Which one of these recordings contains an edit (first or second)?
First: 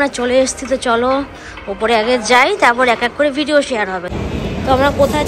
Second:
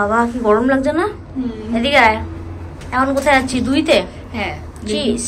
first